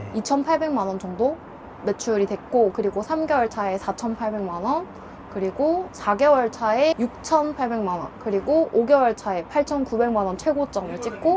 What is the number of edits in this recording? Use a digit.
1